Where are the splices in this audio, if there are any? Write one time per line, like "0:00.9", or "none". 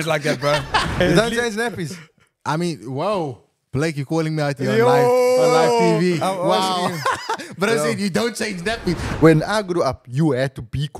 0:01.0
0:09.1